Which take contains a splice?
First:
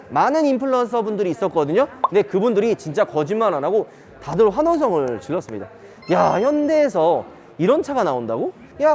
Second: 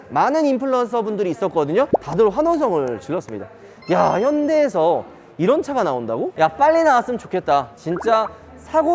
second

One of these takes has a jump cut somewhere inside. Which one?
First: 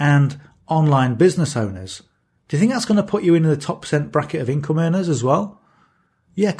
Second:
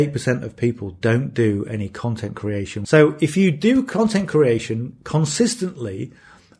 second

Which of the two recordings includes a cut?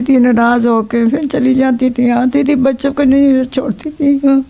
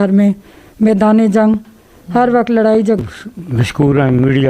second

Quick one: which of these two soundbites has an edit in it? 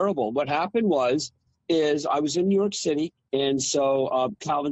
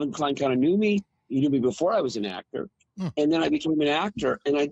first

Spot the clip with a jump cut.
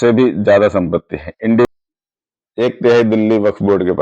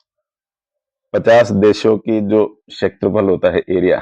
first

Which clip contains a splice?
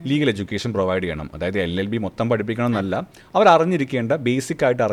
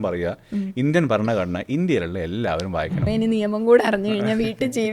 second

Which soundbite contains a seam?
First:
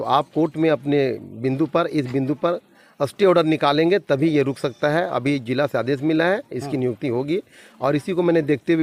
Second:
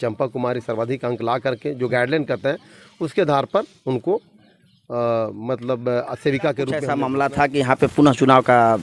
second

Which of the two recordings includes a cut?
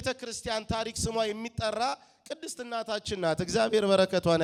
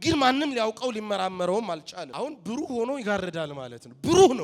second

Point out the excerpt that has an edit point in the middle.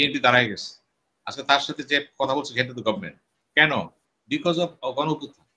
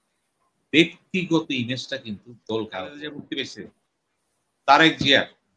second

